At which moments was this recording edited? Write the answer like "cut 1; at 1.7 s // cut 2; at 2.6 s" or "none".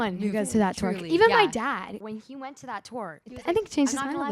cut 1; at 2.0 s // cut 2; at 3.3 s